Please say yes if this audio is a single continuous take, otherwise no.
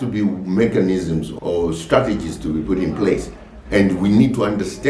no